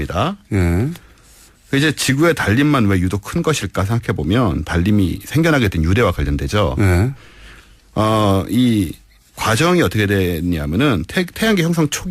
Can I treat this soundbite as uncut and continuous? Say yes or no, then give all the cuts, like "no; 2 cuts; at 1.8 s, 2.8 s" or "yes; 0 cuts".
no; 1 cut; at 3.7 s